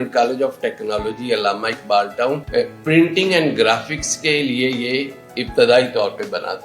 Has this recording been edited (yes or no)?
yes